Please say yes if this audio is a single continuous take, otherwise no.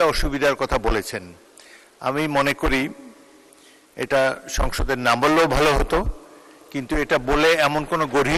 yes